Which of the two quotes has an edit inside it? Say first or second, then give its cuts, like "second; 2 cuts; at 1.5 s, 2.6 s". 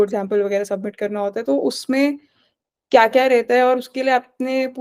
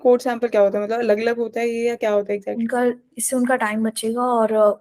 second; 1 cut; at 2.6 s